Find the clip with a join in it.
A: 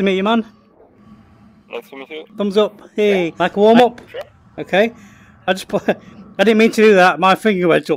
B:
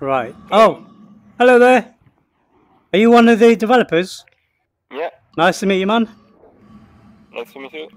A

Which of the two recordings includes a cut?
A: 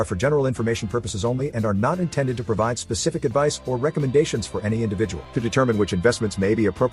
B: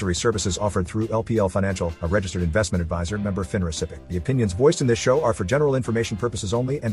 B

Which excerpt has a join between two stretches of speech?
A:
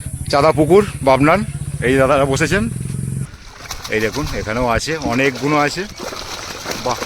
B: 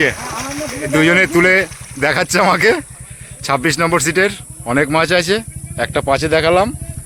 A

